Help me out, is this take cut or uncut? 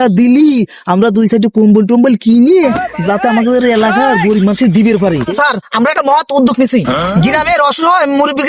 cut